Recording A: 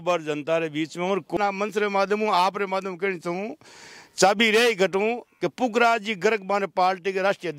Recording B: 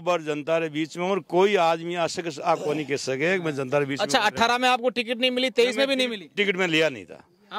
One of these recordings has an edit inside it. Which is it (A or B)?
A